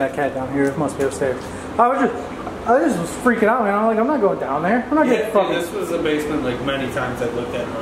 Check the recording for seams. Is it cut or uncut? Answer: uncut